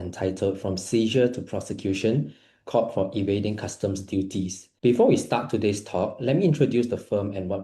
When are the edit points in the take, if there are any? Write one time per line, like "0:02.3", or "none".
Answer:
0:04.7